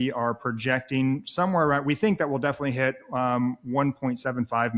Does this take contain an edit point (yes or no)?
no